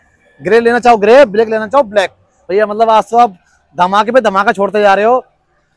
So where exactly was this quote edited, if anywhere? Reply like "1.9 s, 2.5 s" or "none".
2.3 s